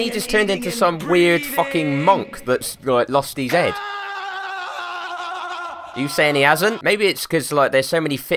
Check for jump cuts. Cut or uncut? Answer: cut